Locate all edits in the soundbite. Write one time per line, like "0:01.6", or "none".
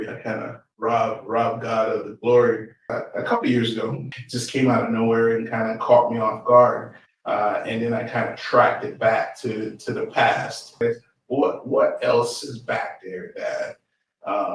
0:02.9
0:04.1
0:10.8